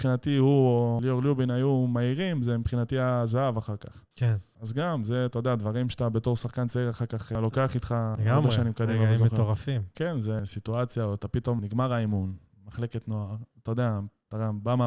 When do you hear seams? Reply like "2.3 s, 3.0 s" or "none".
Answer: 1.0 s, 4.4 s, 7.3 s, 8.2 s, 10.4 s, 11.6 s